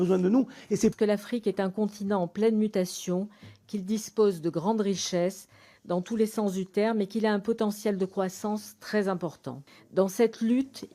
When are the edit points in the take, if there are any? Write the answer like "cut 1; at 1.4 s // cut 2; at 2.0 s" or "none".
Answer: cut 1; at 0.9 s